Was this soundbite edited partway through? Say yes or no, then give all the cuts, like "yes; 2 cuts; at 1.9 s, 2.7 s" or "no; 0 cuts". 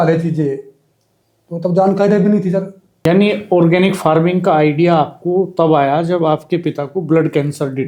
no; 0 cuts